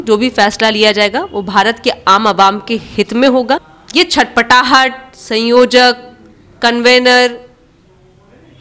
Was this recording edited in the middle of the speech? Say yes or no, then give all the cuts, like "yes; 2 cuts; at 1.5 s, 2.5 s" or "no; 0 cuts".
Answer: yes; 1 cut; at 3.8 s